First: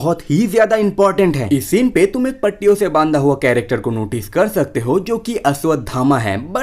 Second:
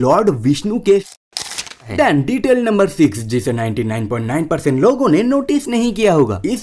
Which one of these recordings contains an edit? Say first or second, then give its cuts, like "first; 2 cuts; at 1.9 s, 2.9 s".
second; 1 cut; at 1.6 s